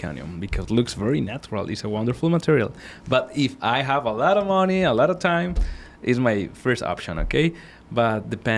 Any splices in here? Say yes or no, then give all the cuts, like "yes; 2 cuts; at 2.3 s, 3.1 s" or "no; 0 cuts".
no; 0 cuts